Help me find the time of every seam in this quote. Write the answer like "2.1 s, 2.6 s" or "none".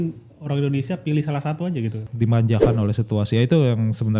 2.1 s